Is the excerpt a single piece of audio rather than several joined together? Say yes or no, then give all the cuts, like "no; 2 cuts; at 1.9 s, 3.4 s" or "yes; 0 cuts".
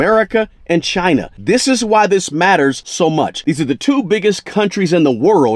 no; 2 cuts; at 1.3 s, 3.2 s